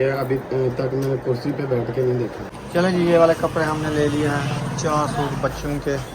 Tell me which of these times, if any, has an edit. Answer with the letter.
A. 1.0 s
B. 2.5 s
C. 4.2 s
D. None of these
B